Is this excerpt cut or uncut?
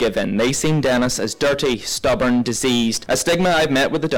cut